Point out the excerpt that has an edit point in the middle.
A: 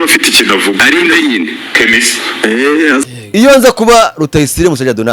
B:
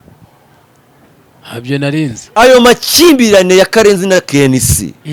A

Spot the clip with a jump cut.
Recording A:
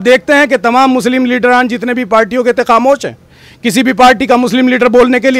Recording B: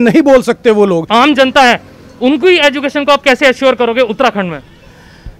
B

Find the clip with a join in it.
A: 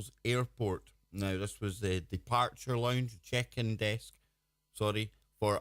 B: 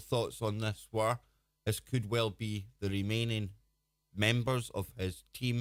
A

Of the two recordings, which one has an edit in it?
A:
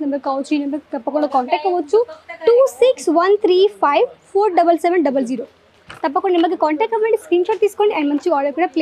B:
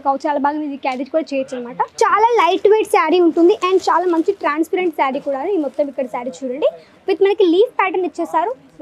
B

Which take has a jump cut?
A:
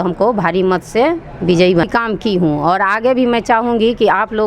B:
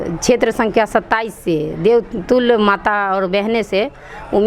A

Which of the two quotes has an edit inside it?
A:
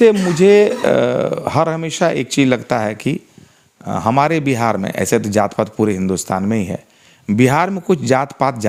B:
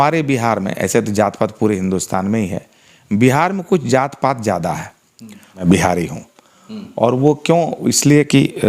B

